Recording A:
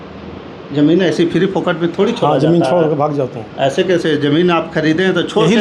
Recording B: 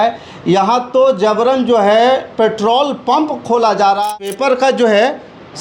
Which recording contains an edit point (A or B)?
B